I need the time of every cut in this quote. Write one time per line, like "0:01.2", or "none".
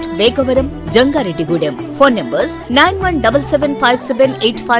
none